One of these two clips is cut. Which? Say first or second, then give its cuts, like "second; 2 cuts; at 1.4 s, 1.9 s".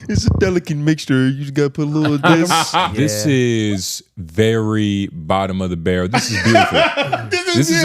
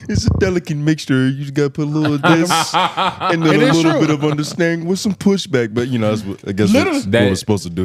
first; 1 cut; at 2.9 s